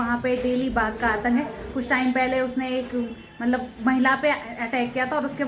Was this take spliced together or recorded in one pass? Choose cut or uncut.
uncut